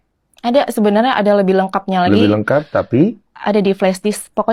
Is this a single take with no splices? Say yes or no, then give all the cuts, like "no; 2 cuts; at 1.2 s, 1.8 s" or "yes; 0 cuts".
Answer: yes; 0 cuts